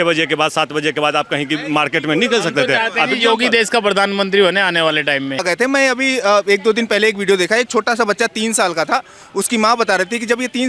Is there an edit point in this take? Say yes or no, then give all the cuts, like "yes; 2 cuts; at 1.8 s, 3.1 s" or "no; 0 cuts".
yes; 1 cut; at 5.4 s